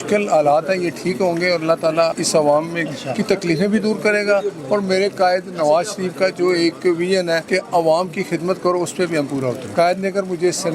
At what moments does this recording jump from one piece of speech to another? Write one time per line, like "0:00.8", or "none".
0:02.2
0:07.4
0:09.6